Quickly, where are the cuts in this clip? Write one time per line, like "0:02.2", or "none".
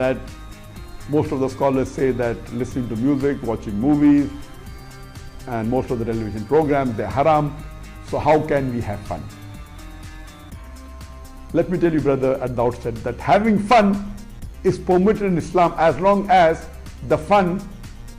none